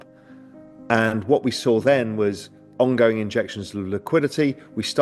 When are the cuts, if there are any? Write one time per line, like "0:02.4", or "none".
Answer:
none